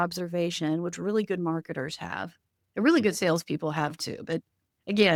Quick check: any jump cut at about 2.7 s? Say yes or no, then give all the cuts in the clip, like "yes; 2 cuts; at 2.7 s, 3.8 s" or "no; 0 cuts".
no; 0 cuts